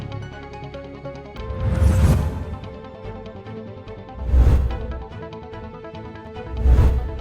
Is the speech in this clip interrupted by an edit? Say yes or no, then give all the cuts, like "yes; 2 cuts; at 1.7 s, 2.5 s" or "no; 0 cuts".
no; 0 cuts